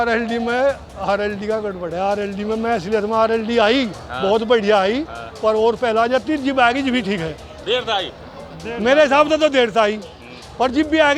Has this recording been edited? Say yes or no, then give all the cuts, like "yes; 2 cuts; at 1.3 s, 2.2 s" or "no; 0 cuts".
no; 0 cuts